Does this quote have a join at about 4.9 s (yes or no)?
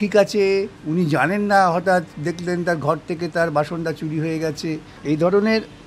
yes